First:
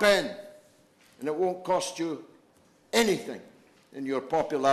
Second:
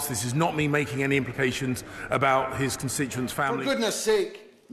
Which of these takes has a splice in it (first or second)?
second